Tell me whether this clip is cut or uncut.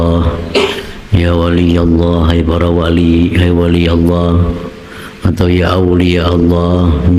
uncut